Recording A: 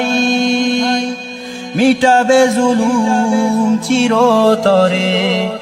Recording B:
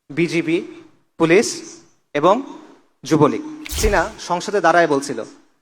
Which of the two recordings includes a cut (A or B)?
B